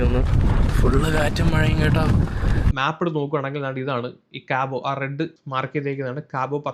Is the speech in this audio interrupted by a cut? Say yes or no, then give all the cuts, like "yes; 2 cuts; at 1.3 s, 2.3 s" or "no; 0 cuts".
yes; 1 cut; at 2.7 s